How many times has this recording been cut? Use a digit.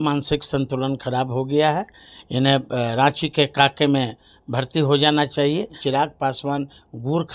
1